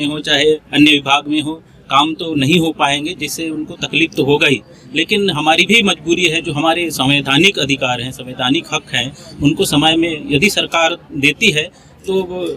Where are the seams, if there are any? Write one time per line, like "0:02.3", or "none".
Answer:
none